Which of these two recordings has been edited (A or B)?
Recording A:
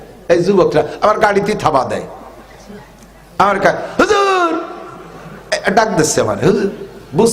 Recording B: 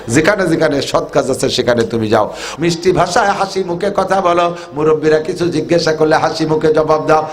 B